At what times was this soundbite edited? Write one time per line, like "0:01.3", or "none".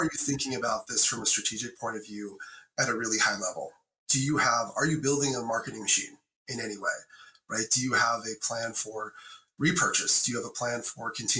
none

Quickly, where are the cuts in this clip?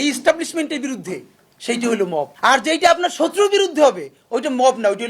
0:02.3

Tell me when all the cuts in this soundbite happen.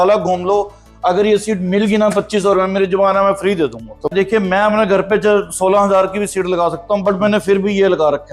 0:04.1

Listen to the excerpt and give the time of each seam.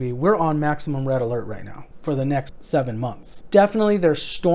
0:02.3
0:03.3

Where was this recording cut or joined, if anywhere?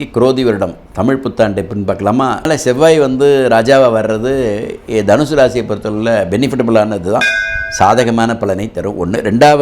0:02.5

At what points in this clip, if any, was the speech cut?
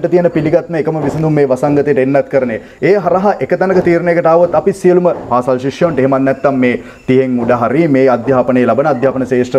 none

